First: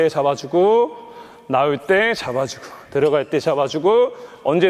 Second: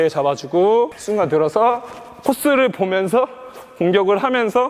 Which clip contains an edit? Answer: second; 1 cut; at 1.0 s

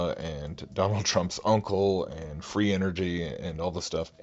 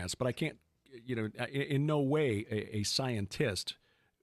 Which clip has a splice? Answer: first; 1 cut; at 2.6 s

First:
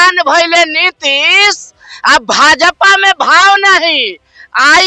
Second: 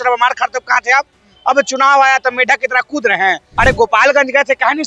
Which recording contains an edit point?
second; 1 cut; at 3.5 s

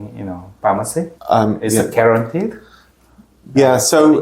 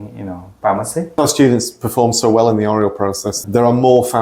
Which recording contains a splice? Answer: second; 2 cuts; at 1.2 s, 3.3 s

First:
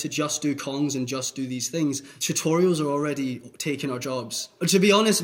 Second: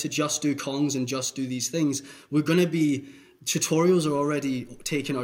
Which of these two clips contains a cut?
first; 2 cuts; at 2.1 s, 4.3 s

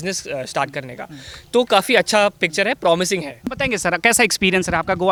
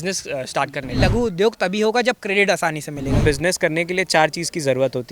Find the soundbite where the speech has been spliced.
second; 2 cuts; at 1.0 s, 3.2 s

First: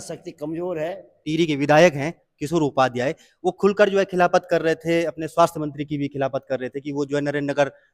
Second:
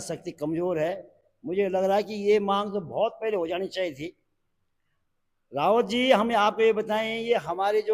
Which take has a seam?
first; 1 cut; at 1.2 s

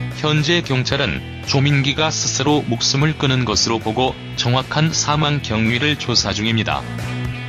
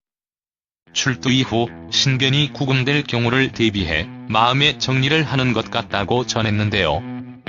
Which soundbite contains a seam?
second; 1 cut; at 5.7 s

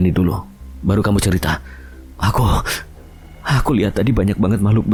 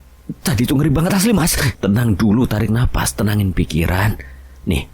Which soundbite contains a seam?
second; 1 cut; at 1.7 s

